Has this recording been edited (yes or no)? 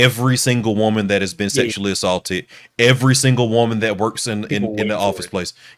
no